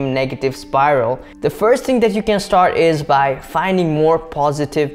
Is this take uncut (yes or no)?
no